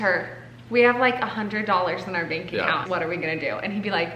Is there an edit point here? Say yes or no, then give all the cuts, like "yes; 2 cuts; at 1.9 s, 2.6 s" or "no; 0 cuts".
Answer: yes; 1 cut; at 2.8 s